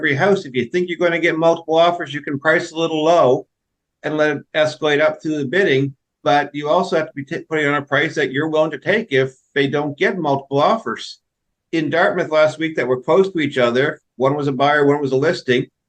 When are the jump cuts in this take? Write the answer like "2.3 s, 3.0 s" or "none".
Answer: none